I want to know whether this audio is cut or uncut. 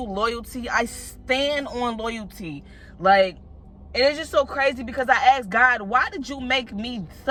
uncut